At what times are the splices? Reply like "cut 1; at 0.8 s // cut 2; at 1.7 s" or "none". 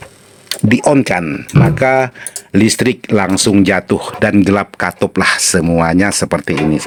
none